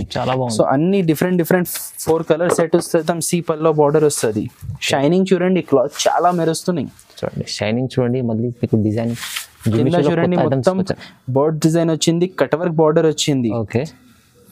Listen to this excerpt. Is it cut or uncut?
cut